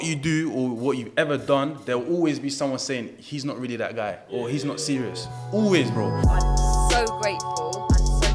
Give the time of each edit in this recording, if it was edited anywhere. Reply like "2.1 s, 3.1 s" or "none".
6.0 s